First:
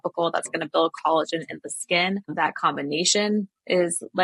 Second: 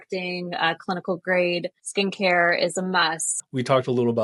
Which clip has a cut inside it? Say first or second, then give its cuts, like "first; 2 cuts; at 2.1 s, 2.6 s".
second; 2 cuts; at 1.8 s, 3.3 s